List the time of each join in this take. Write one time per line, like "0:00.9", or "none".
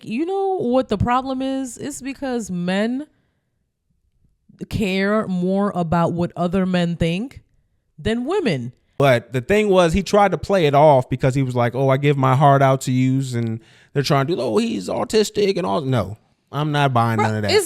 0:08.8